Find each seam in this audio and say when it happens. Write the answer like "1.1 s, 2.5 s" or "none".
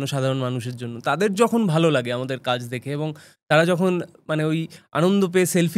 none